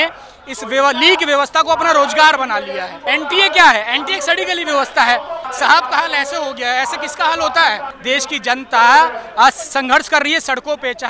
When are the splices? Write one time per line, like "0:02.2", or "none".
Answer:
0:03.0
0:05.4
0:07.9